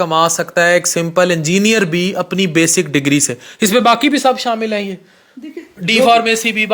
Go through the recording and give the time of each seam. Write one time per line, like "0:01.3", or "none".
none